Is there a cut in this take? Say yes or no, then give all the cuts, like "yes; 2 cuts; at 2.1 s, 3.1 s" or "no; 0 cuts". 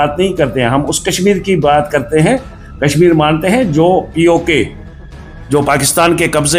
no; 0 cuts